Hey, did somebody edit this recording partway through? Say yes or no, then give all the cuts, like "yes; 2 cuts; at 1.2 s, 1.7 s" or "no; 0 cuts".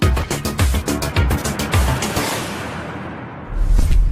yes; 1 cut; at 0.9 s